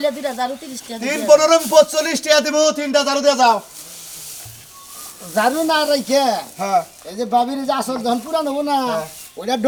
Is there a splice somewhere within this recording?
no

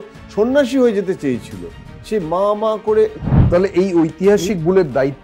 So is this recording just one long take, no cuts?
no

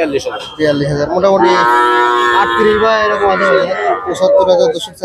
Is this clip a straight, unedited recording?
no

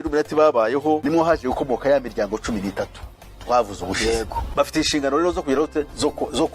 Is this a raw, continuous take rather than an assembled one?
no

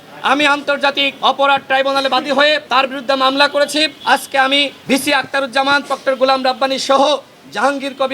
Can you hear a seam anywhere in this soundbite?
yes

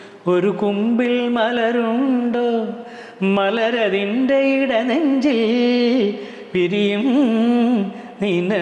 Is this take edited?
no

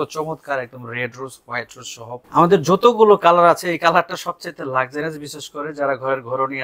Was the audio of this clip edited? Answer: yes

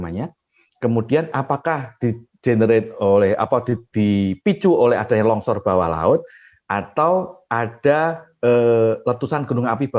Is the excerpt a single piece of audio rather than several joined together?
yes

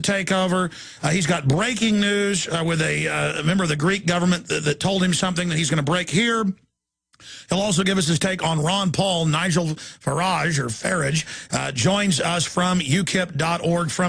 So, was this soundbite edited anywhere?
yes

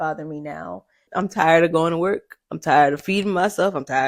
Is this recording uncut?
no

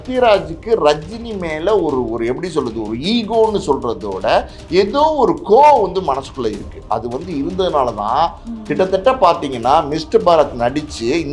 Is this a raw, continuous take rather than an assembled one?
yes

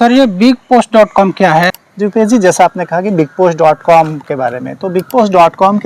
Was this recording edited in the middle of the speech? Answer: yes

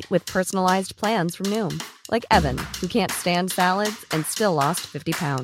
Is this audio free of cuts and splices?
yes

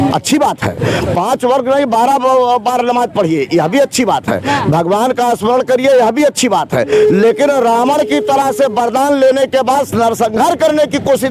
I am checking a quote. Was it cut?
no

